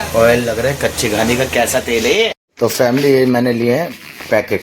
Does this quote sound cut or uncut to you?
cut